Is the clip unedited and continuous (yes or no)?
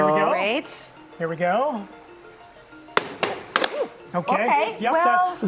yes